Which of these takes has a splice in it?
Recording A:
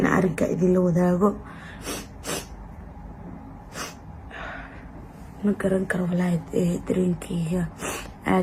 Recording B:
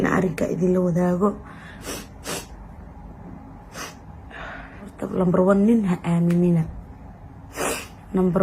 B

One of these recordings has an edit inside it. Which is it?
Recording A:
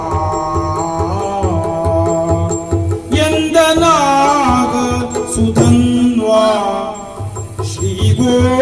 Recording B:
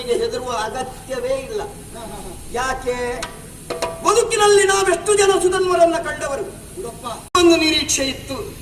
B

